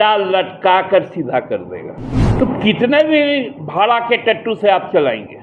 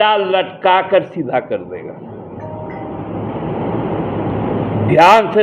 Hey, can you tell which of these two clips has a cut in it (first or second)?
first